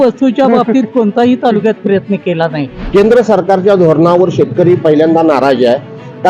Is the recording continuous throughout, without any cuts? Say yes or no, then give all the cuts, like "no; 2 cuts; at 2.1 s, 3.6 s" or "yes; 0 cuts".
no; 1 cut; at 2.7 s